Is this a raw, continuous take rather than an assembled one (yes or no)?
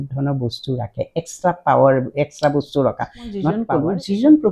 no